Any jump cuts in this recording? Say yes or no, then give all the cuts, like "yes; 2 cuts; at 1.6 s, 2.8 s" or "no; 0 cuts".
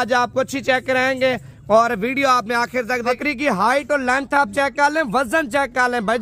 yes; 1 cut; at 3.2 s